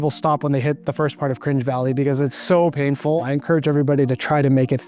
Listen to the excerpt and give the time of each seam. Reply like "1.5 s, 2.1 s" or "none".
0.8 s, 3.2 s